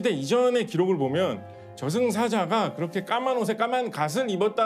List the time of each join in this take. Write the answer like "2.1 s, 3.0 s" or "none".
none

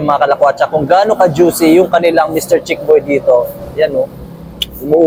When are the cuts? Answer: none

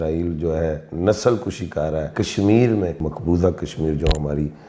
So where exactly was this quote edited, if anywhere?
2.1 s, 3.1 s

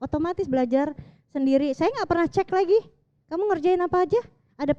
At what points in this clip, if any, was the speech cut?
none

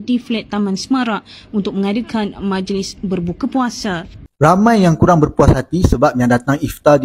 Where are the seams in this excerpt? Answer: 4.2 s

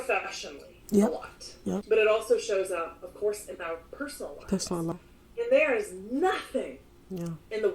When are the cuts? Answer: 1.8 s, 4.9 s

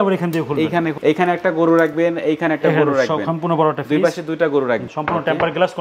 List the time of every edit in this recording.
1.0 s, 4.8 s

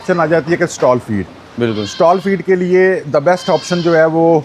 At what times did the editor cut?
none

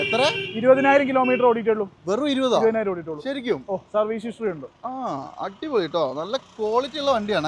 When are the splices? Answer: none

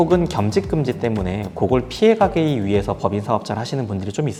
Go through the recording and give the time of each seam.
none

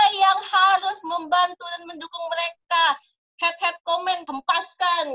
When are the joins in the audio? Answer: 4.2 s

